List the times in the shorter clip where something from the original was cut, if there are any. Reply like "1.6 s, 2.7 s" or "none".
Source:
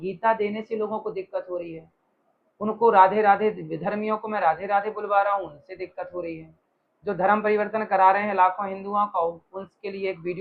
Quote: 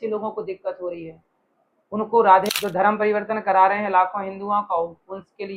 2.4 s